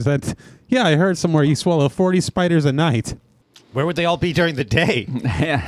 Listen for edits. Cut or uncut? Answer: uncut